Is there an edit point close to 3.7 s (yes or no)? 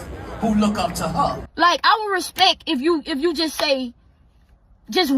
no